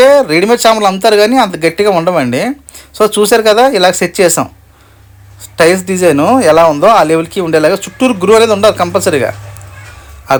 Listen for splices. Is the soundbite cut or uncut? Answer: uncut